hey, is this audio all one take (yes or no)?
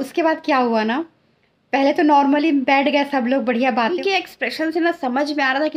no